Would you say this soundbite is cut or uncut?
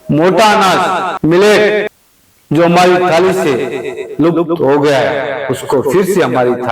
cut